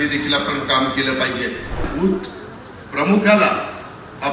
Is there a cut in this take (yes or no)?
yes